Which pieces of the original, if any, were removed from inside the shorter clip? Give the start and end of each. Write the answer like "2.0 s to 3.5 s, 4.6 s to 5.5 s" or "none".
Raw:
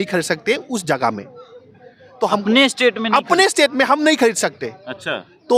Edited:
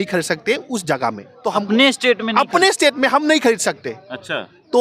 1.3 s to 2.0 s